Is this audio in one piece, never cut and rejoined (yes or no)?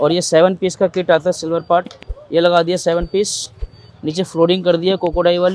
yes